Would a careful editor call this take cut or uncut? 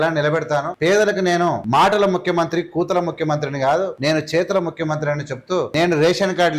cut